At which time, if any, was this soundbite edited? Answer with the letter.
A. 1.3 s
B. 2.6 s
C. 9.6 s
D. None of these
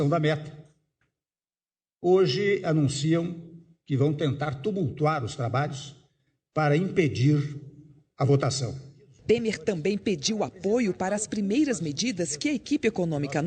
D